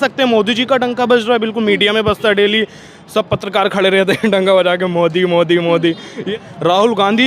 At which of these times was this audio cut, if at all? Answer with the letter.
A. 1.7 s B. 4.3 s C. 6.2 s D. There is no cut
C